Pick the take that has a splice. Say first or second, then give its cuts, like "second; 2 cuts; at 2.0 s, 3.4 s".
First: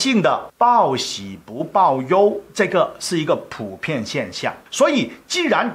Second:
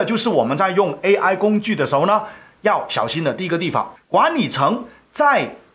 second; 1 cut; at 4.0 s